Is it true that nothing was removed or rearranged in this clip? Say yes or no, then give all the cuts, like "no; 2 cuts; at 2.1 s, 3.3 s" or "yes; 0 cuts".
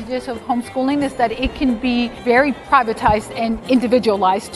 no; 1 cut; at 2.4 s